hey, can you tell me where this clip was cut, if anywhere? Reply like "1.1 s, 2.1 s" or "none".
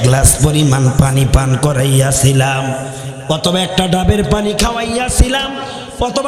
none